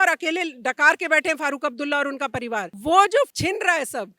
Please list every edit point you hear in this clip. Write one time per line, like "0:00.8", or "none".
0:02.7
0:03.3

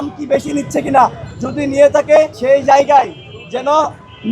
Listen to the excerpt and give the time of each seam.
0:02.4

